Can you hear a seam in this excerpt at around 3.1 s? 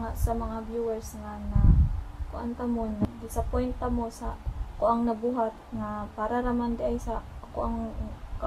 yes; 1 cut; at 3.1 s

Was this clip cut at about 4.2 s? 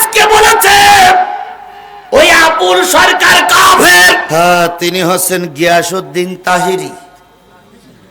yes; 1 cut; at 4.2 s

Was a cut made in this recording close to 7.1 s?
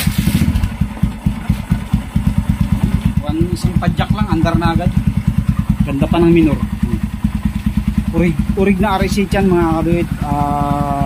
no; 0 cuts

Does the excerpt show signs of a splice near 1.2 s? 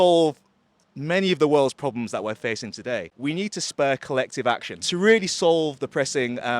no; 2 cuts; at 3.1 s, 4.8 s

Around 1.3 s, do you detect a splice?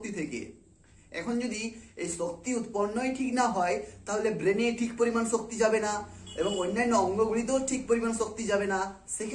no; 0 cuts

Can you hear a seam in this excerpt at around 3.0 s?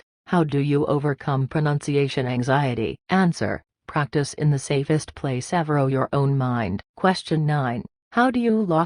no; 1 cut; at 6.8 s

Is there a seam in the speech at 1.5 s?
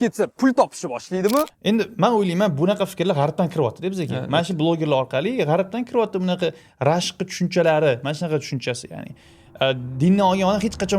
yes; 1 cut; at 1.5 s

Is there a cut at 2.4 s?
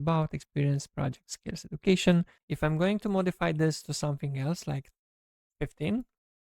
yes; 1 cut; at 2.4 s

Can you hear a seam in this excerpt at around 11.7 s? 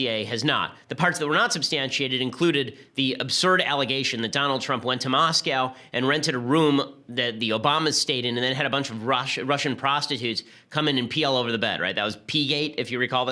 yes; 1 cut; at 11.7 s

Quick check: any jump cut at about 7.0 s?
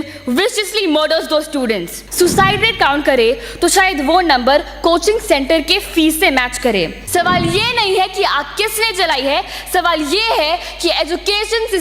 yes; 2 cuts; at 2.0 s, 7.0 s

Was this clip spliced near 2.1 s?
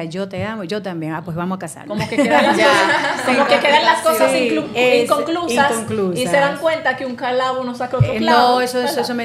no; 0 cuts

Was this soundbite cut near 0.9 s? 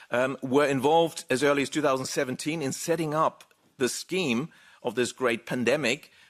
no; 0 cuts

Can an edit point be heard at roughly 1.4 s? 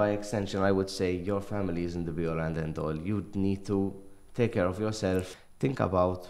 no; 1 cut; at 5.3 s

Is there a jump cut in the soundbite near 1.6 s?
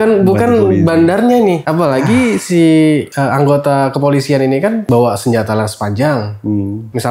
no; 0 cuts

